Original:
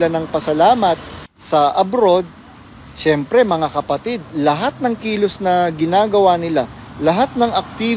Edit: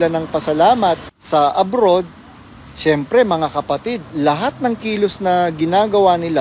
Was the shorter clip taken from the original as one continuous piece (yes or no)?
no